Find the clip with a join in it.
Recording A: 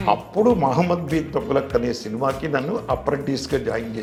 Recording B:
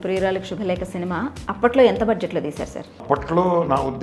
B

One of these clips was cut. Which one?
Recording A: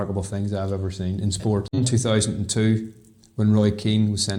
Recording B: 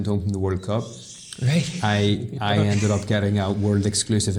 A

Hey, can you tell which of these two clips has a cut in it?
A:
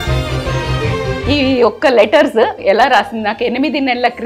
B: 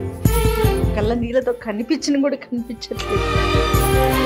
A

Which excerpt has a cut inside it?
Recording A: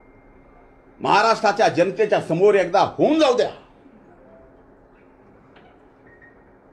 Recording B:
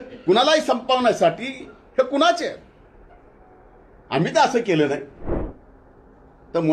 B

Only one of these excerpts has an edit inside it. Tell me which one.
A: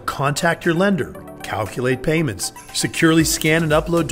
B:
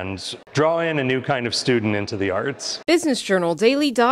B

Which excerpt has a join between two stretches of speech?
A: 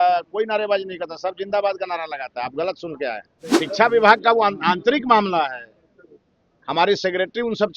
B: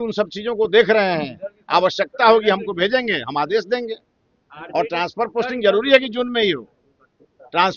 A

